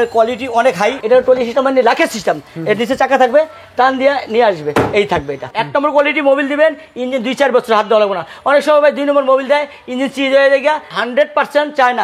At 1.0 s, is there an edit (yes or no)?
yes